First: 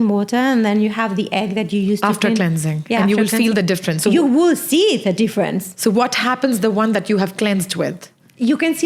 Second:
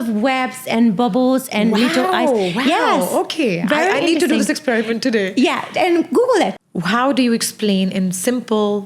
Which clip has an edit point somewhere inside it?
second; 1 cut; at 6.6 s

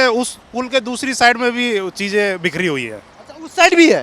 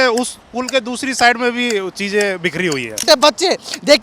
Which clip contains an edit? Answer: second; 1 cut; at 3.0 s

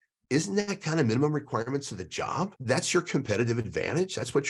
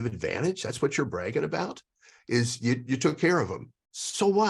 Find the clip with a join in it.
first; 1 cut; at 2.6 s

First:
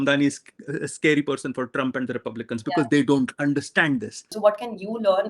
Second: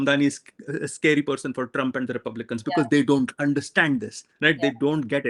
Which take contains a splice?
first; 1 cut; at 4.3 s

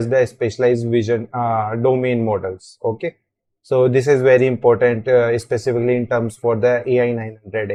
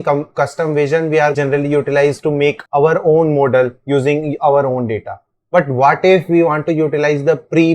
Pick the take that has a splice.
second; 2 cuts; at 1.3 s, 2.6 s

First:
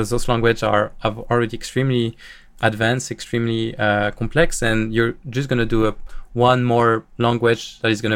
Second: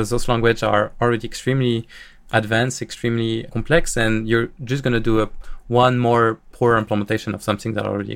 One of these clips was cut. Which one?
second; 3 cuts; at 0.9 s, 3.5 s, 6.5 s

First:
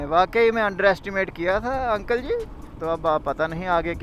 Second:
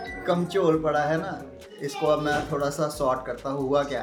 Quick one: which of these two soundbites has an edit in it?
first; 1 cut; at 2.6 s

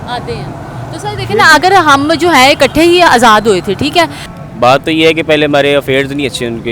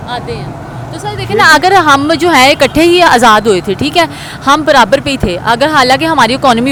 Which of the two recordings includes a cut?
first; 1 cut; at 4.3 s

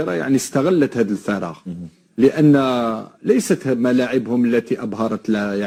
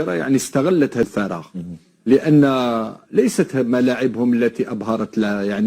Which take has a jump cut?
second; 1 cut; at 1.1 s

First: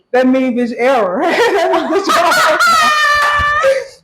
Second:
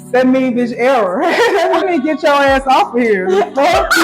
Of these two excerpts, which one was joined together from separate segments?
second; 1 cut; at 1.8 s

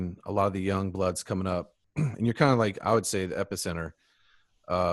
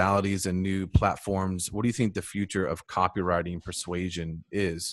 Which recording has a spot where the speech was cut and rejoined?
first; 1 cut; at 1.8 s

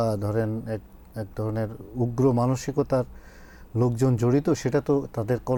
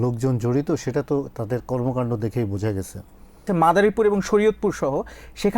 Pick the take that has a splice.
second; 1 cut; at 3.4 s

